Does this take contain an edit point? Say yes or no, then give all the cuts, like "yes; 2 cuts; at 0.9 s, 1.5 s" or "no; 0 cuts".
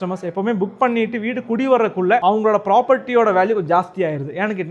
yes; 1 cut; at 2.2 s